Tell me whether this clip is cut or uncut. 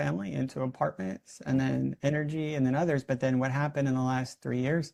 uncut